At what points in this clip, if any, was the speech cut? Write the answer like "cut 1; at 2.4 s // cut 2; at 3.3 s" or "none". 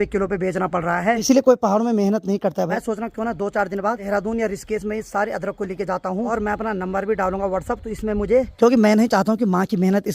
cut 1; at 1.2 s // cut 2; at 2.7 s // cut 3; at 4.0 s // cut 4; at 6.3 s // cut 5; at 8.5 s